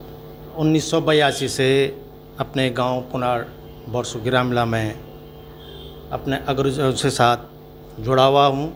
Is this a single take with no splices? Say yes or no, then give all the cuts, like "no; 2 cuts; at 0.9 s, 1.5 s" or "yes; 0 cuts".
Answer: yes; 0 cuts